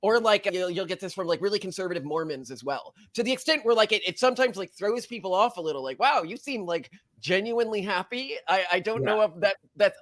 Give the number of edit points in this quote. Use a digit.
0